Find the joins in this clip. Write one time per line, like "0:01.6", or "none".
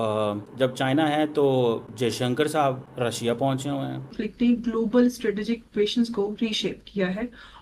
0:04.0